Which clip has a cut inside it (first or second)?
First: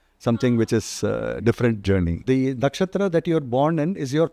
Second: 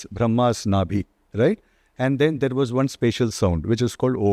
first